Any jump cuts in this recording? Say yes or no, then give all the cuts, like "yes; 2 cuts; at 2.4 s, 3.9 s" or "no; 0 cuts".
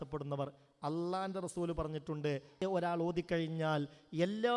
yes; 1 cut; at 2.6 s